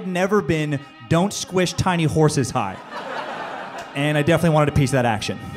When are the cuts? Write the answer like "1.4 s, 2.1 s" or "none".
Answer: none